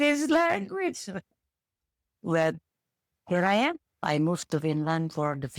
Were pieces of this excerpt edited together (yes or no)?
yes